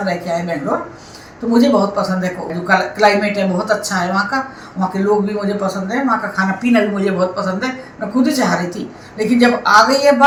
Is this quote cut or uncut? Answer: uncut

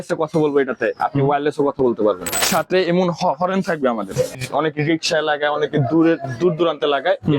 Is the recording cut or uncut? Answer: cut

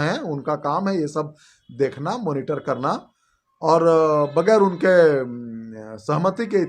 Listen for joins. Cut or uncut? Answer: uncut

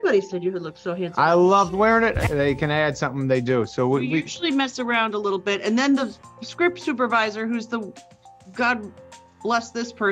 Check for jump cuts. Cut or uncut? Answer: cut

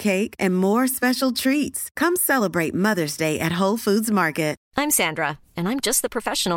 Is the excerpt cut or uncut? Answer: cut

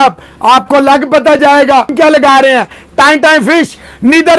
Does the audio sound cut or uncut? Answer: cut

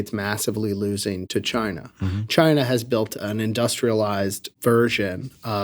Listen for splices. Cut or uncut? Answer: cut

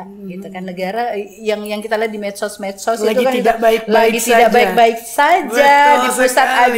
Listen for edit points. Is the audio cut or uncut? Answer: uncut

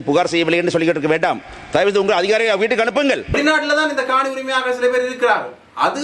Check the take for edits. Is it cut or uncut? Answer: cut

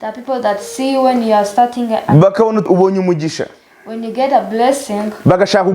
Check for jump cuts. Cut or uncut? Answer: cut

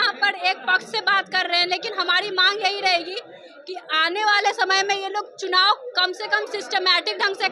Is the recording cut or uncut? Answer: uncut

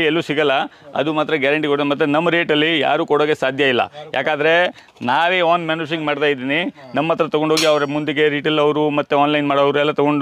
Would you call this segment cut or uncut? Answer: uncut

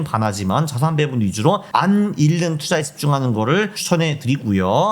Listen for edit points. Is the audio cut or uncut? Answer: cut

